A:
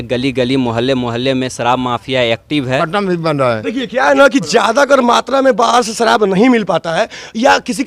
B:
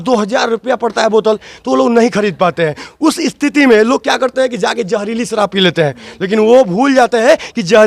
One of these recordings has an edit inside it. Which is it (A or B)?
A